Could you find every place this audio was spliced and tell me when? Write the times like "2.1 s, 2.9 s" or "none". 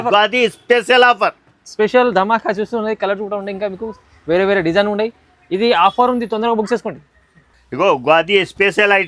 none